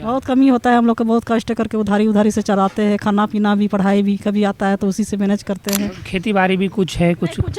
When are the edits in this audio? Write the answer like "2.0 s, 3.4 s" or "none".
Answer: 6.0 s